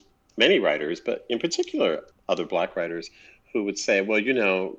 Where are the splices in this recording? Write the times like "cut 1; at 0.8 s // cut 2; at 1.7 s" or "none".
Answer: cut 1; at 2.1 s